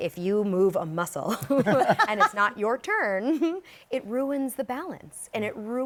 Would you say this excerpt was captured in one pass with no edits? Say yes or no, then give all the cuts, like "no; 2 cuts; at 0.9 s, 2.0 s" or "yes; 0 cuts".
yes; 0 cuts